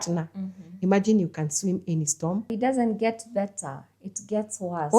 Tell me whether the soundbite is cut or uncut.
cut